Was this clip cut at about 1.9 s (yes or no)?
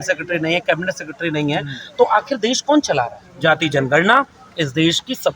no